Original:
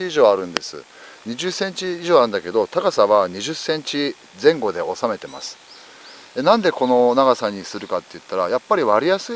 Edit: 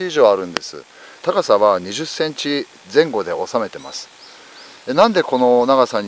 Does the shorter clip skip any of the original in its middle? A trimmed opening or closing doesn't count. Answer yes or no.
yes